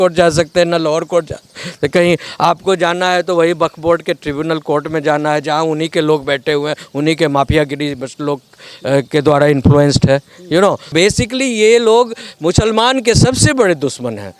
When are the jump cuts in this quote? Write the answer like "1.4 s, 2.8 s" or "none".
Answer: 10.9 s